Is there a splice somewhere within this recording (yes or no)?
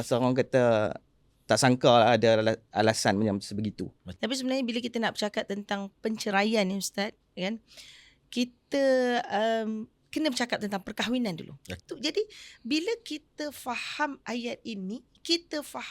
yes